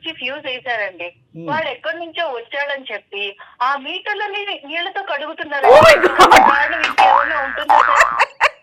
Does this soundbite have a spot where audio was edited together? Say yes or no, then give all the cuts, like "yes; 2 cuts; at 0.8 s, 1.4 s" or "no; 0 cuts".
no; 0 cuts